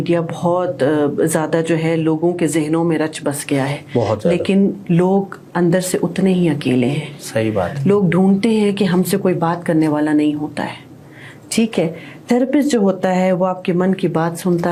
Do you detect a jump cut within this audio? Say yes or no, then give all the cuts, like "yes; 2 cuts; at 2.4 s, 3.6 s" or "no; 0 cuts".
no; 0 cuts